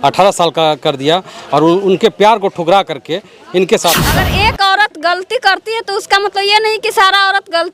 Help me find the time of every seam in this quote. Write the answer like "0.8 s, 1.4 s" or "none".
4.2 s